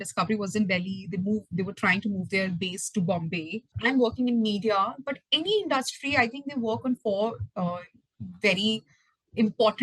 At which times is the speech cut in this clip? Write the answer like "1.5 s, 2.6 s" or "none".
3.7 s